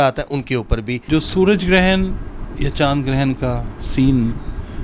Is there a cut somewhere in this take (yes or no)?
yes